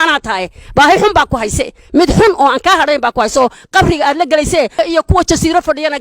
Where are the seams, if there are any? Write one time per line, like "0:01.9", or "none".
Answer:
0:04.7